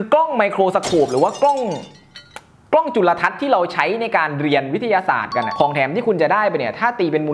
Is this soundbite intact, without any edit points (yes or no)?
no